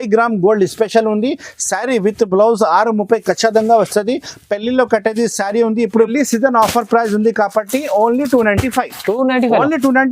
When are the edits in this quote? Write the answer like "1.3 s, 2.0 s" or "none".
6.1 s